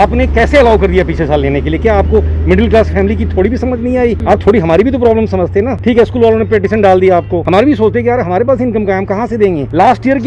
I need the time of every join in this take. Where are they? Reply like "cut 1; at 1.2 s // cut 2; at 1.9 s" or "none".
none